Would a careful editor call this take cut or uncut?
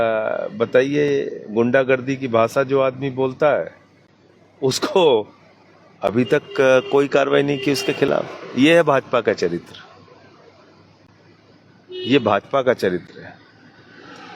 uncut